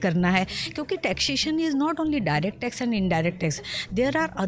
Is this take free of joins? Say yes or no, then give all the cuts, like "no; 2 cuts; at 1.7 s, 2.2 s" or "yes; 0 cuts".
yes; 0 cuts